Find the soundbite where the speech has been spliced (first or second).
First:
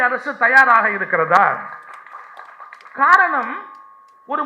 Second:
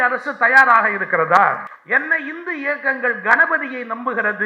second